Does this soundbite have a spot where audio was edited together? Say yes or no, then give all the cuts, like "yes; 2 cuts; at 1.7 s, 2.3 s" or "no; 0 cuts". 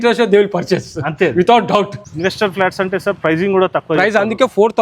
yes; 1 cut; at 2.0 s